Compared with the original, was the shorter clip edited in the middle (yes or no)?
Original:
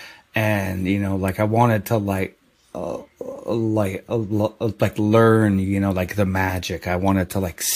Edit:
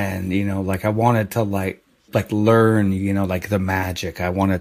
yes